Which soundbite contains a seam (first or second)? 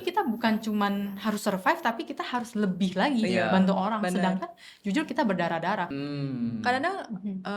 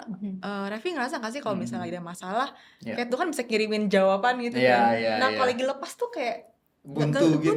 first